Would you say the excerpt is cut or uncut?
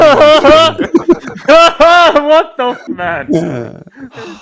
cut